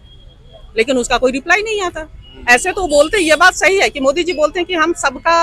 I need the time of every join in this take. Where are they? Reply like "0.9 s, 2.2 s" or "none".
none

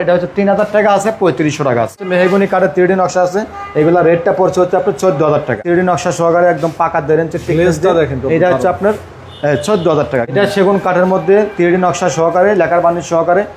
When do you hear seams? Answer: 2.0 s, 5.6 s, 10.3 s

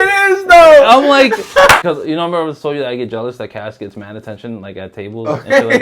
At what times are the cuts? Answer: 1.8 s

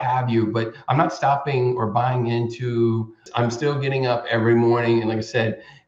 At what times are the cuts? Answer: 3.2 s

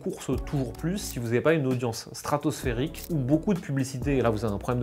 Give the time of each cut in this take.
none

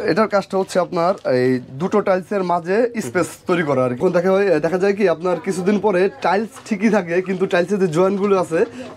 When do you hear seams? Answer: 4.0 s

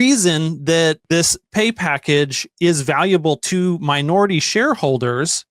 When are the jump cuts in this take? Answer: 1.0 s

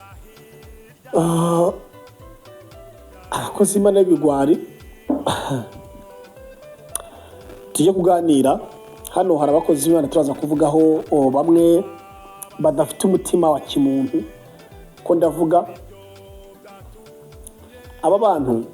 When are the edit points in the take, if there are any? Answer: 5.0 s

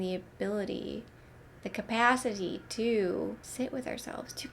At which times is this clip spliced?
3.4 s

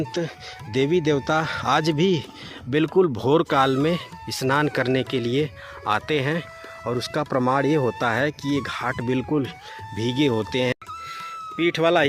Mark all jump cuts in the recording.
10.7 s

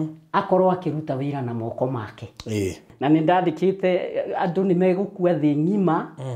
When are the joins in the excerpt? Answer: 2.9 s

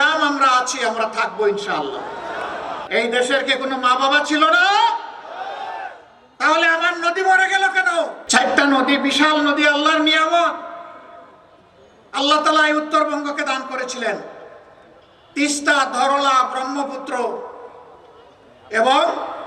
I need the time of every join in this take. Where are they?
2.8 s, 8.2 s

